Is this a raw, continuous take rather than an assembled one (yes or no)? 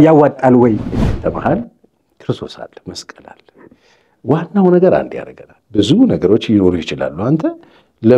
no